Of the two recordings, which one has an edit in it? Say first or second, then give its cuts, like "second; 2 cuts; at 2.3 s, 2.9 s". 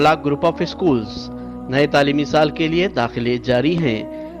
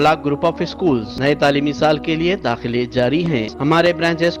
second; 2 cuts; at 1.1 s, 3.5 s